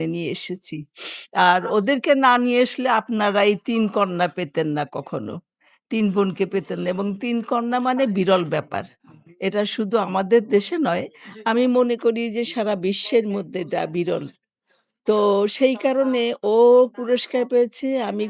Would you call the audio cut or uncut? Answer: uncut